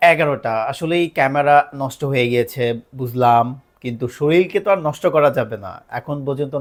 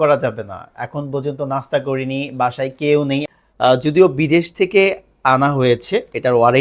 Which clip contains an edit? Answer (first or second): second